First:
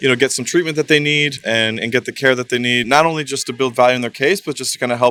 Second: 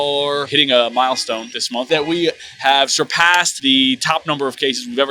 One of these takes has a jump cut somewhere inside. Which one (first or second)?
second